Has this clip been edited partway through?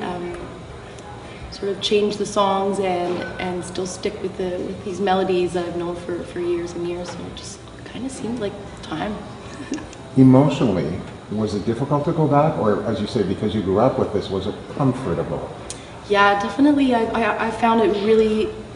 no; 0 cuts

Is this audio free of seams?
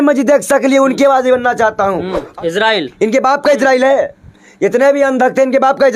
no; 1 cut; at 2.2 s

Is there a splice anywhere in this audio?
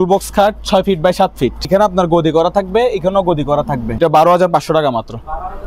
yes; 2 cuts; at 1.7 s, 4.0 s

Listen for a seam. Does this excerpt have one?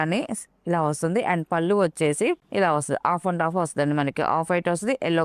no; 0 cuts

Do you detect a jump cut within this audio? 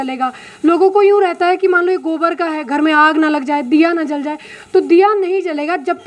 no; 0 cuts

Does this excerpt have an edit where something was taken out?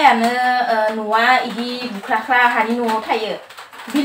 no; 0 cuts

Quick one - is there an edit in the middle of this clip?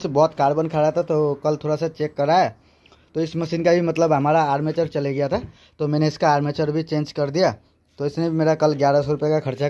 no; 0 cuts

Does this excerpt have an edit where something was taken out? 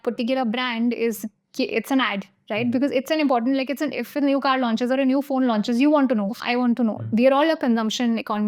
yes; 1 cut; at 7.0 s

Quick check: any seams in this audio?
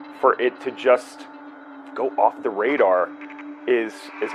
no; 0 cuts

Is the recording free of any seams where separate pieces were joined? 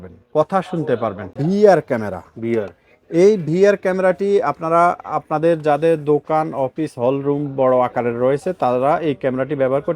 no; 1 cut; at 1.4 s

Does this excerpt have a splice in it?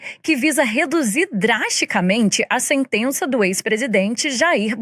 no; 0 cuts

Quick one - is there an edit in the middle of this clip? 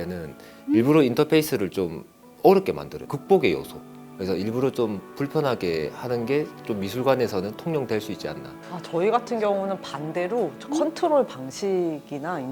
no; 0 cuts

